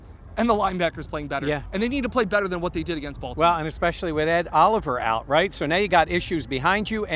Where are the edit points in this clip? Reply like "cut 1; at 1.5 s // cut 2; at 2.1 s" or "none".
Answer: none